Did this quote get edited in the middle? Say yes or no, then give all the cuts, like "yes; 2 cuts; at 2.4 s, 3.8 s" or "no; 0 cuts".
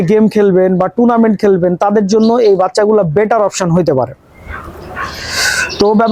no; 0 cuts